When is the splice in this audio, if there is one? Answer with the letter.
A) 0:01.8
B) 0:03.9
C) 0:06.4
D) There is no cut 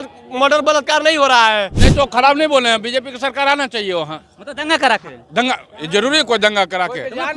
A